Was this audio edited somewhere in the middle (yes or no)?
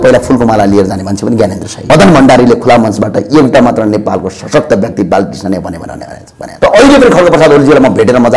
yes